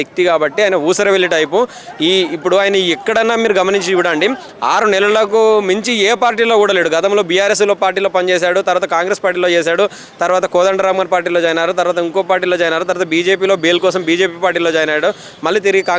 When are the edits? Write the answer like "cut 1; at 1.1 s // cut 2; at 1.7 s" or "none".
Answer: none